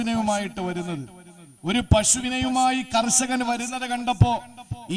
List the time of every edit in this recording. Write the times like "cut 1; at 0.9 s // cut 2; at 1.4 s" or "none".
none